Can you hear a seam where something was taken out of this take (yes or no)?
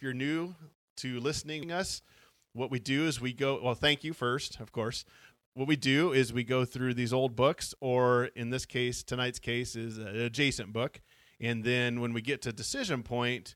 yes